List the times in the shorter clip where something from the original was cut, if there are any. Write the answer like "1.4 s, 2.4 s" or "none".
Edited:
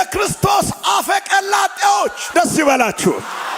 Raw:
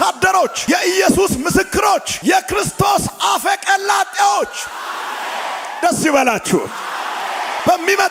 2.2 s